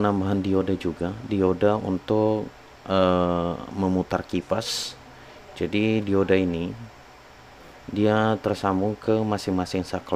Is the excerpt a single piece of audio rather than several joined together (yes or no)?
yes